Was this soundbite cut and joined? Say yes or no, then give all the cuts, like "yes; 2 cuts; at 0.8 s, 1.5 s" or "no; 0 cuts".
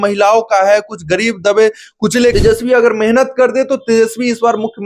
yes; 1 cut; at 2.3 s